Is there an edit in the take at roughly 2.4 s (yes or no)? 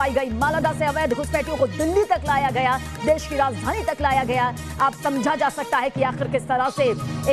no